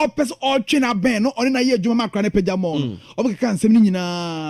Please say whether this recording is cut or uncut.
uncut